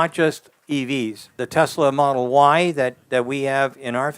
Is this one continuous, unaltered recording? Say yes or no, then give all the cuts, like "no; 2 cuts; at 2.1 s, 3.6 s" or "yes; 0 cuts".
no; 1 cut; at 1.4 s